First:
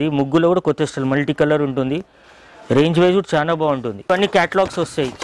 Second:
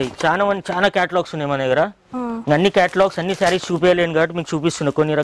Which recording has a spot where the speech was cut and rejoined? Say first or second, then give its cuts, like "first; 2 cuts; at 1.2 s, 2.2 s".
first; 1 cut; at 4.1 s